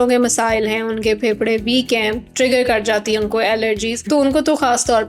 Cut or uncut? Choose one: cut